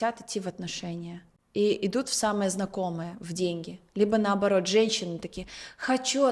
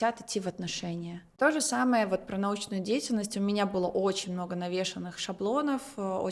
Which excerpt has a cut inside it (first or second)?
second